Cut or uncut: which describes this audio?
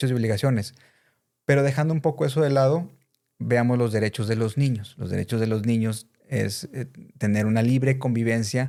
uncut